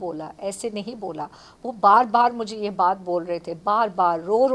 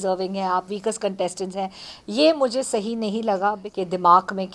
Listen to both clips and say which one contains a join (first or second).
second